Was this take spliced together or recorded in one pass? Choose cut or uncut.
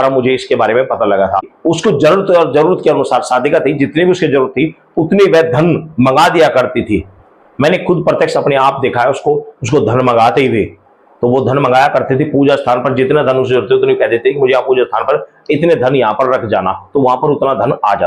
cut